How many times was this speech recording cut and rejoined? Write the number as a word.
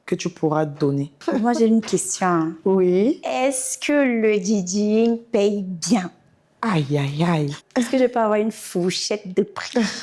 two